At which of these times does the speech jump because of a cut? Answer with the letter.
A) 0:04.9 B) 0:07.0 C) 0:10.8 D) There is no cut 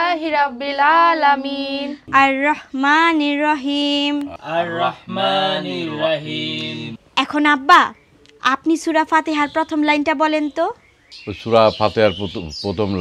B